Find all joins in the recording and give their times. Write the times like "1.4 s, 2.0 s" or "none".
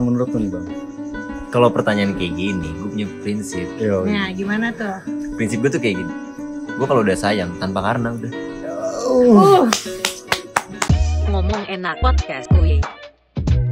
10.8 s